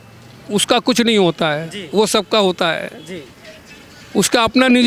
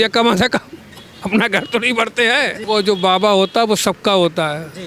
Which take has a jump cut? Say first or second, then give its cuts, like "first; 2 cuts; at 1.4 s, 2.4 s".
second; 1 cut; at 2.6 s